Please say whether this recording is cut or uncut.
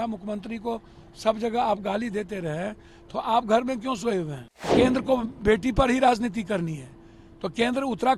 cut